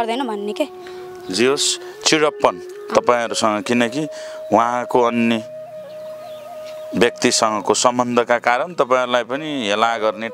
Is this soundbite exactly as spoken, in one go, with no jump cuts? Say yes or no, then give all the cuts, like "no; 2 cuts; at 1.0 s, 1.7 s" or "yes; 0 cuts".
yes; 0 cuts